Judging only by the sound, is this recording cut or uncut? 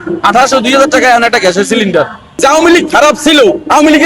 cut